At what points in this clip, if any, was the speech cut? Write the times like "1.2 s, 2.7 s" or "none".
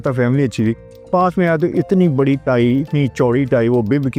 none